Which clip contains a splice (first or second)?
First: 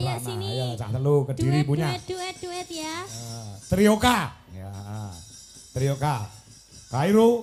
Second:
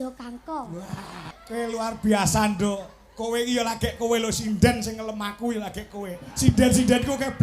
second